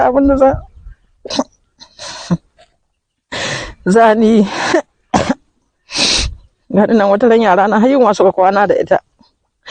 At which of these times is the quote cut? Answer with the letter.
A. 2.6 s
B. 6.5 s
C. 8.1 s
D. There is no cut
D